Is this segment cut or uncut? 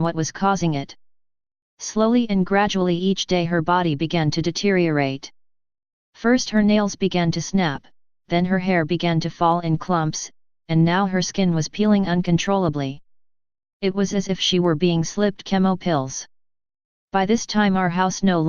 cut